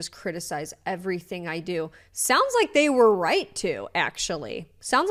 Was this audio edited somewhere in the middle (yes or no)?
no